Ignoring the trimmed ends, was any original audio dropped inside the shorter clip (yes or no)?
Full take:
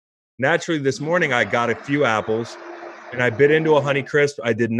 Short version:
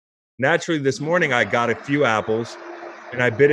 no